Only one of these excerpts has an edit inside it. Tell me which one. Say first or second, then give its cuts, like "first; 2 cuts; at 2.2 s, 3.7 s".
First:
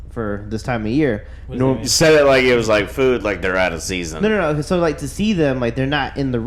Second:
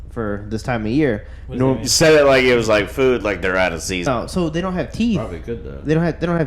second; 1 cut; at 4.1 s